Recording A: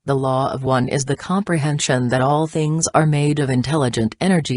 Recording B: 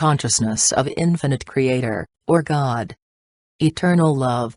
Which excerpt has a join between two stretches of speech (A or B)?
A